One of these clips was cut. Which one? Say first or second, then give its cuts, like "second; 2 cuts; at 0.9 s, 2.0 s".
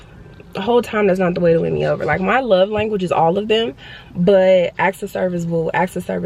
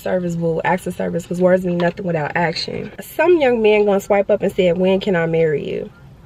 second; 1 cut; at 3.0 s